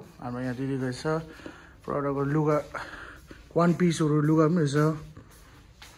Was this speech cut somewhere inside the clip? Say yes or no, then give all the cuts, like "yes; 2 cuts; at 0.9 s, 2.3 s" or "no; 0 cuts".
no; 0 cuts